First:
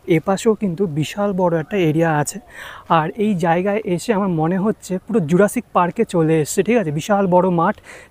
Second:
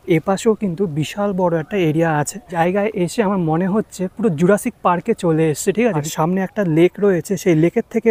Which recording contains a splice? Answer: second; 2 cuts; at 2.5 s, 6.0 s

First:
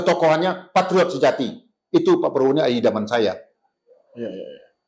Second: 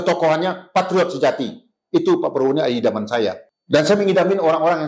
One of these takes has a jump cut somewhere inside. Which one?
second; 1 cut; at 3.5 s

